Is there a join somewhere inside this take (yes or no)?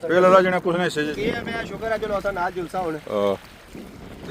yes